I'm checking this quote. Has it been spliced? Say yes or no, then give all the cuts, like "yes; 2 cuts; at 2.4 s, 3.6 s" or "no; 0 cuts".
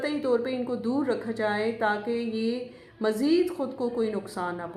no; 0 cuts